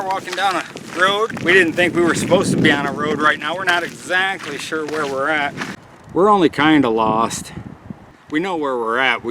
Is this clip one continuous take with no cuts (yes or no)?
no